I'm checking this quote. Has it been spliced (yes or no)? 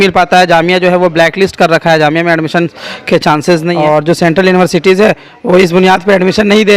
yes